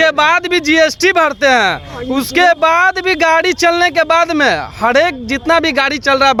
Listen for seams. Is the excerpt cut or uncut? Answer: uncut